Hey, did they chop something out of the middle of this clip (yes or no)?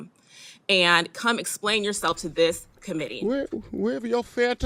no